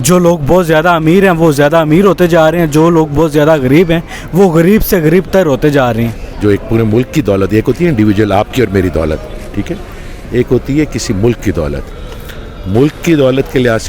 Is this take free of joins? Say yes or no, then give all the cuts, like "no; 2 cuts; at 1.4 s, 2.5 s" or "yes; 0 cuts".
no; 1 cut; at 6.2 s